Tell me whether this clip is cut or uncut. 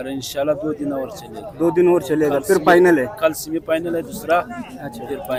uncut